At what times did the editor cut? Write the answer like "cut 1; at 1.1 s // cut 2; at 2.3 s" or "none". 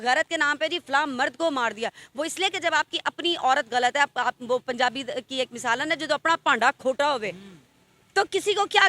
none